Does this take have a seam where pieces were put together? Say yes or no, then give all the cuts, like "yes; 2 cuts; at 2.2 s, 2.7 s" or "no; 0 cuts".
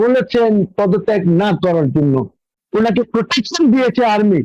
yes; 1 cut; at 2.5 s